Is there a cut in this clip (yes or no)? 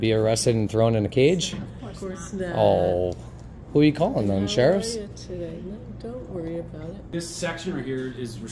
yes